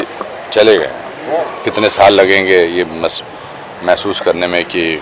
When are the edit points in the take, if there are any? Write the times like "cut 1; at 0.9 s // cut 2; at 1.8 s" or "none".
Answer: cut 1; at 1.5 s